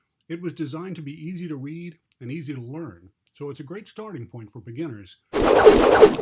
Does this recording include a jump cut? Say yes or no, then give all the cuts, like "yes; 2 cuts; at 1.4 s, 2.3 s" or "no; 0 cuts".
yes; 1 cut; at 5.1 s